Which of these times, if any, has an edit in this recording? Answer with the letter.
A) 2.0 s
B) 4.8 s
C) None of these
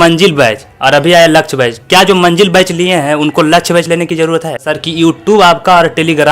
B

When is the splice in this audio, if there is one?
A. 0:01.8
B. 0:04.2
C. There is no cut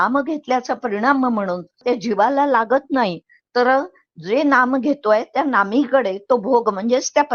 A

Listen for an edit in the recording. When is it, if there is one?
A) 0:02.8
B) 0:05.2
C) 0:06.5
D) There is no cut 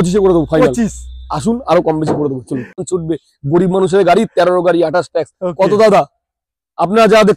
A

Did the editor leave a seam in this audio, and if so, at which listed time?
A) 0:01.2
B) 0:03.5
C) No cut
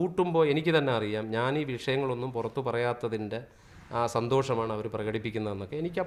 C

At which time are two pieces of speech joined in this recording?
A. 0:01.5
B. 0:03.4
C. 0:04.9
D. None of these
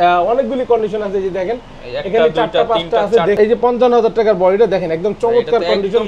B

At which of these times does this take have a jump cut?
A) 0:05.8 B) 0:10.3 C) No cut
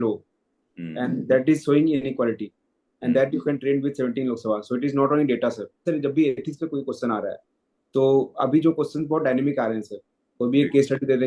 A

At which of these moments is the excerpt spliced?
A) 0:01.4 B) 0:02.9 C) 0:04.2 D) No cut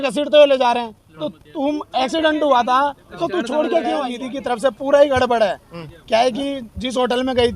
C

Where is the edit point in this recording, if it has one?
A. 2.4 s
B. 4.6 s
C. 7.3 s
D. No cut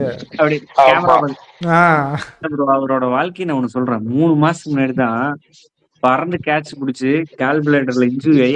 A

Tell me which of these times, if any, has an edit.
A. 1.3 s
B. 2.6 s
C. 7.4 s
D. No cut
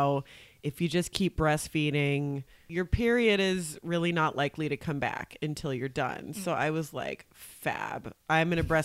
B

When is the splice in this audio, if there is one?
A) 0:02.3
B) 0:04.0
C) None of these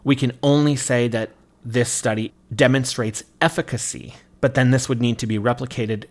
A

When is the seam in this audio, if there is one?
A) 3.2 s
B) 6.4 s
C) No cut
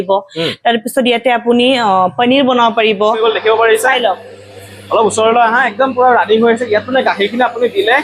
A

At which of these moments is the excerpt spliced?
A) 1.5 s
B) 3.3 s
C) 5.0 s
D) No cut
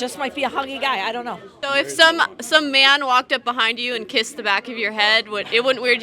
A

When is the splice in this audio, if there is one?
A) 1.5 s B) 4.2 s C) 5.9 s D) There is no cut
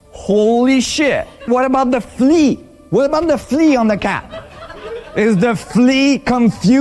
A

